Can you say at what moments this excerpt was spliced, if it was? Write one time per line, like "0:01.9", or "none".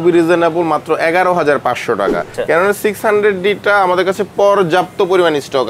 0:02.3